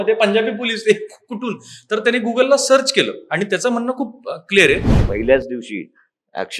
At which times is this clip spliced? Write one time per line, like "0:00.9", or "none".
0:04.9